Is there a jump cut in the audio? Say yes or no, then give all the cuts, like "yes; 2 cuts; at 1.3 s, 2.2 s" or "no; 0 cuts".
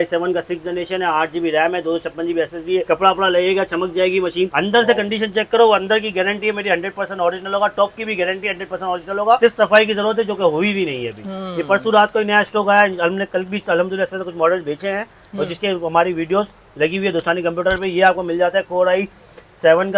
no; 0 cuts